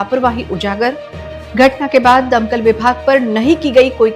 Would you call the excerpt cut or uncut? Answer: uncut